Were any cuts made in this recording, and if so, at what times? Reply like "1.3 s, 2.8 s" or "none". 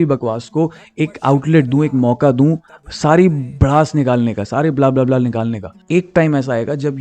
5.8 s